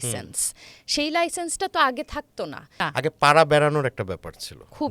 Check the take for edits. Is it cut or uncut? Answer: cut